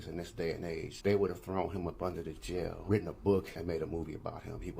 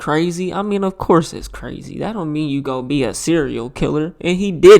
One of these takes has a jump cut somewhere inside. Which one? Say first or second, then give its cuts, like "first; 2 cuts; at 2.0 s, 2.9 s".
first; 3 cuts; at 0.9 s, 2.8 s, 3.5 s